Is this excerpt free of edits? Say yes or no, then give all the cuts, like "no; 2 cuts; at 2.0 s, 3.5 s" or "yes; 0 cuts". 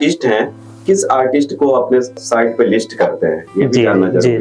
yes; 0 cuts